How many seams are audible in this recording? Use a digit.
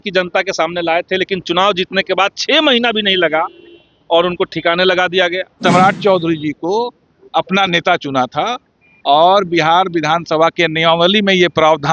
1